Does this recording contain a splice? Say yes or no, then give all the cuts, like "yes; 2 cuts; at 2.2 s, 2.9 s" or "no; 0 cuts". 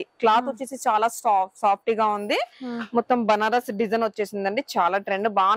no; 0 cuts